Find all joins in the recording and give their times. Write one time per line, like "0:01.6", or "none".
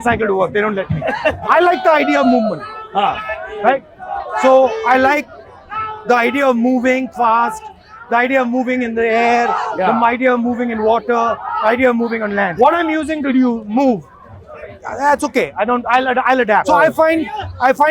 0:01.4
0:12.5
0:16.7